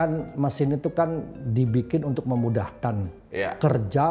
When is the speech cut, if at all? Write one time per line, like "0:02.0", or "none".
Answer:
none